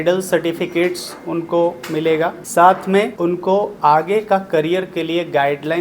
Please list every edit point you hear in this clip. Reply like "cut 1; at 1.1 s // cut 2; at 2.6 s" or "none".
cut 1; at 2.4 s // cut 2; at 3.1 s